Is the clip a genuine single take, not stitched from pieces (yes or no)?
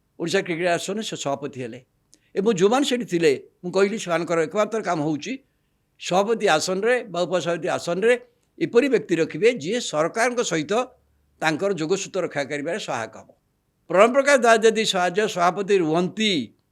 no